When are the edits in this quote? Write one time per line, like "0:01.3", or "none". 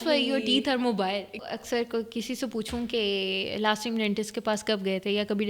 0:01.5